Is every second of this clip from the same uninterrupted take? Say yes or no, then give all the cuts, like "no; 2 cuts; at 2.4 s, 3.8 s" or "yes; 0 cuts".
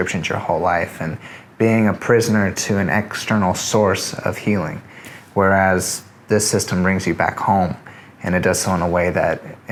yes; 0 cuts